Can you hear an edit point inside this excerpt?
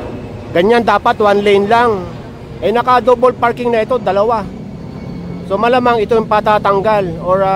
no; 0 cuts

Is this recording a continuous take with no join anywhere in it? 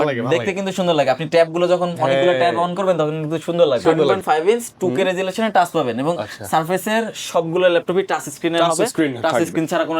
no; 1 cut; at 4.1 s

